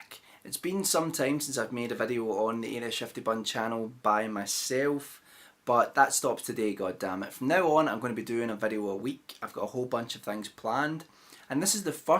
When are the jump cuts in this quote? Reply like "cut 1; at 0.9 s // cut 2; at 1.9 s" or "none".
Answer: cut 1; at 9.0 s